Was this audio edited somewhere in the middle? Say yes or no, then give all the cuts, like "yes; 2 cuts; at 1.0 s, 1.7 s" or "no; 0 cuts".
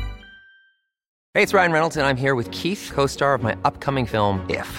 yes; 1 cut; at 1.1 s